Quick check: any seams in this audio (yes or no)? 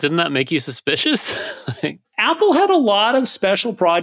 yes